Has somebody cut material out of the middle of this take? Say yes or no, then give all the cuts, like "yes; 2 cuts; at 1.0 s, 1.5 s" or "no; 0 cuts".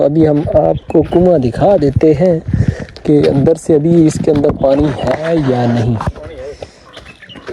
no; 0 cuts